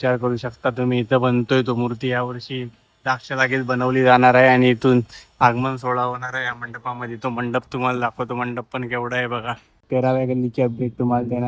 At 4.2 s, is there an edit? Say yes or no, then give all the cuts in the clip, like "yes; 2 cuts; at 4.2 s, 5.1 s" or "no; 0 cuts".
no; 1 cut; at 9.7 s